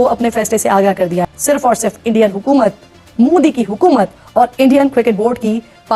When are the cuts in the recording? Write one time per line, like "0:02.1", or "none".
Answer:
0:01.3